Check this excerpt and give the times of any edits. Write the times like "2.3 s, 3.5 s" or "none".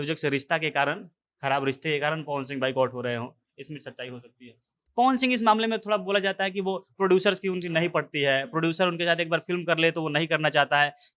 4.7 s